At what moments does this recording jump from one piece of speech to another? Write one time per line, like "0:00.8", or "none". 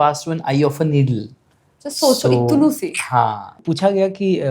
0:03.6